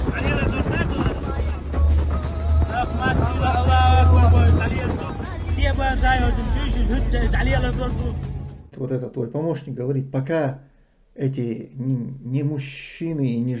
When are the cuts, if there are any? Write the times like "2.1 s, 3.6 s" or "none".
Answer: 8.7 s